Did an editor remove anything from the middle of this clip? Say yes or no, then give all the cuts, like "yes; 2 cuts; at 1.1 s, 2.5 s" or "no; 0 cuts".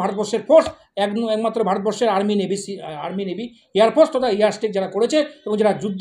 no; 0 cuts